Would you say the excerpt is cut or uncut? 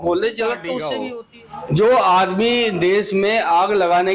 cut